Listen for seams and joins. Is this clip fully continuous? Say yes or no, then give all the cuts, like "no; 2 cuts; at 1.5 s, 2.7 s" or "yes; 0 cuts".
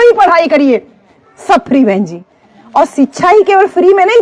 yes; 0 cuts